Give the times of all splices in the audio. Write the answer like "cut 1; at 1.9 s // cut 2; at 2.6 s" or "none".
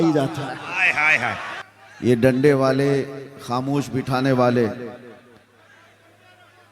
cut 1; at 1.5 s